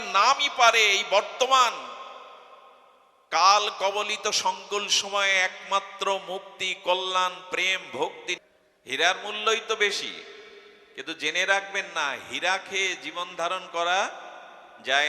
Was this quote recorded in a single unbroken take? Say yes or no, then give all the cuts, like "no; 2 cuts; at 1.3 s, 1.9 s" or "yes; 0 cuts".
no; 1 cut; at 8.4 s